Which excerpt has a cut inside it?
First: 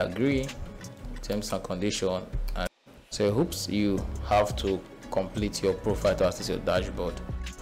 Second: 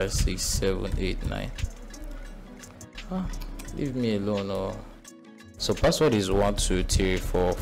first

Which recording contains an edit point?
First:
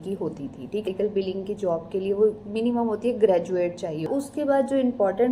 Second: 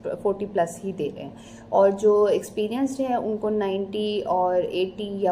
first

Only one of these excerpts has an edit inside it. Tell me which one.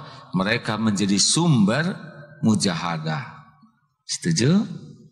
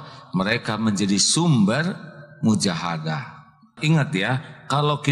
second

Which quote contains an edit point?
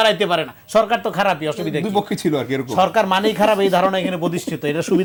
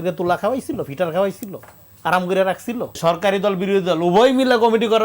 second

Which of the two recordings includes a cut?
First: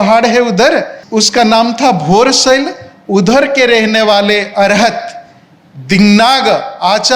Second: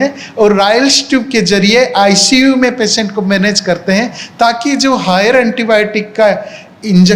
first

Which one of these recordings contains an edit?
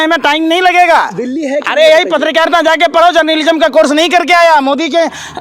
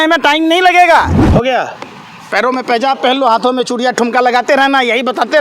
second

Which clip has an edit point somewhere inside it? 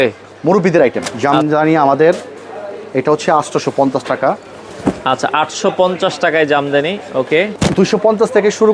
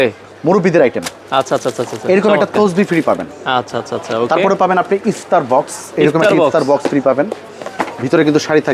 first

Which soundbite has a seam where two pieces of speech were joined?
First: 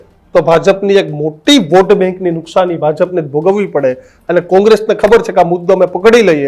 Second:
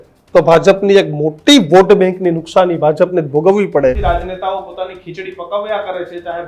second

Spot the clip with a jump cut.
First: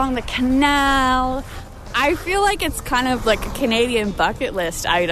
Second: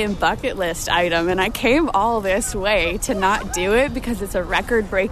first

